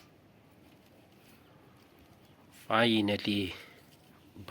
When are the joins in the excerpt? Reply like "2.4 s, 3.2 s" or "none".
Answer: none